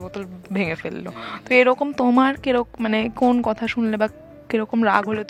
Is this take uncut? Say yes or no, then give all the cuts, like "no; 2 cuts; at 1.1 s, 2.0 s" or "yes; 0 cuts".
yes; 0 cuts